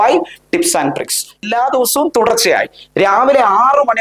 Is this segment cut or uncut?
cut